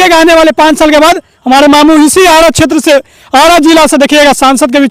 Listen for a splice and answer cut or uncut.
uncut